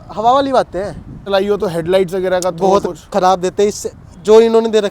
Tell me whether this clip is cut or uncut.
cut